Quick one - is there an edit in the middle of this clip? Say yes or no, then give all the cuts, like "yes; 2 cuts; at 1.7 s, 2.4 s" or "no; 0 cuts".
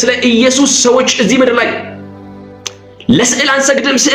no; 0 cuts